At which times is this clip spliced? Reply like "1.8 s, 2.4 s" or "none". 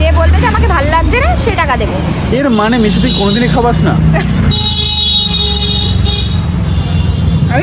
none

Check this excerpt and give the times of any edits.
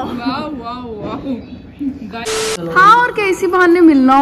2.5 s

